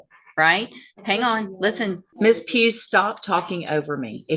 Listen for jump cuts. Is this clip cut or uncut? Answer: cut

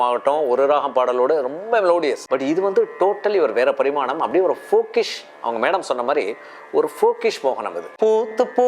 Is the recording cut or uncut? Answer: cut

